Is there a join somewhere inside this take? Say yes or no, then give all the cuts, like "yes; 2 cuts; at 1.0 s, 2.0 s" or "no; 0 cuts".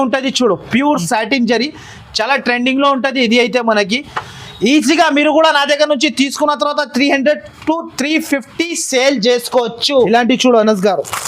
yes; 1 cut; at 10.1 s